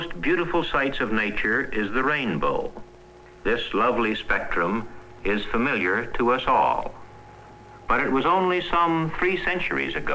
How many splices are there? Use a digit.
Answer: 1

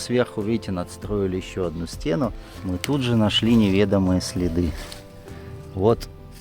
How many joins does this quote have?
1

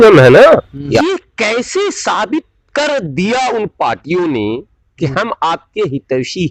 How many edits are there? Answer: 1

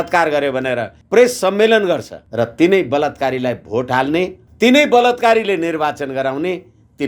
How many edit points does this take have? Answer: 3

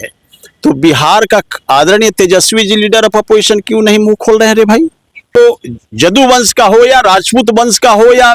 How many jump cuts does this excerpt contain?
1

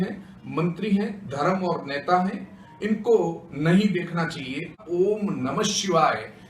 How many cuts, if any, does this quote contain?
1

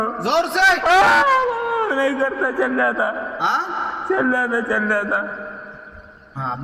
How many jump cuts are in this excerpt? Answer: 0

